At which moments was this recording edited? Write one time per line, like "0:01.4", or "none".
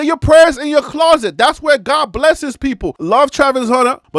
0:02.9

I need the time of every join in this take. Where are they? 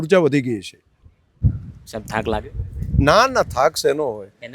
0:01.5

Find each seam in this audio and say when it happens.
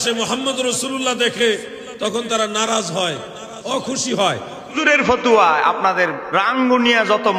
0:04.8

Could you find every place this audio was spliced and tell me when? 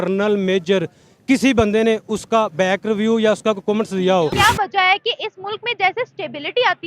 0:04.3

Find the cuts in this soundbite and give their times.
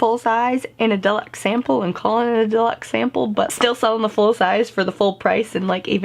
0:03.5

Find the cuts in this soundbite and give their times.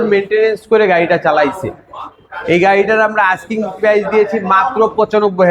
none

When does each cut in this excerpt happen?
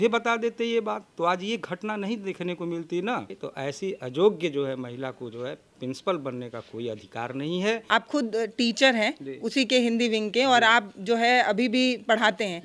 0:03.3
0:07.8

